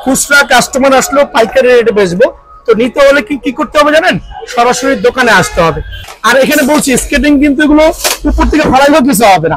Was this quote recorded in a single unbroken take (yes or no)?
no